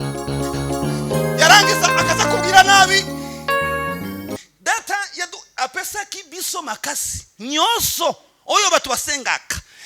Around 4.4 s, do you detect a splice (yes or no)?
yes